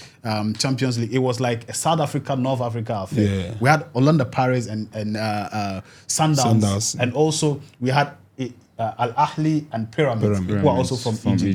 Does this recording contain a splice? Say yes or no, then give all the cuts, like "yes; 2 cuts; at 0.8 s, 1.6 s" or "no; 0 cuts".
no; 0 cuts